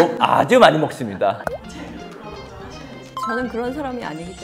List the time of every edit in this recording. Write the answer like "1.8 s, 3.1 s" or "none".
1.4 s